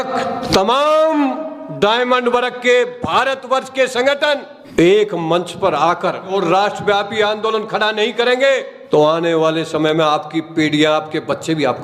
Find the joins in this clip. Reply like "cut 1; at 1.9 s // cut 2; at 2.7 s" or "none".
cut 1; at 6.3 s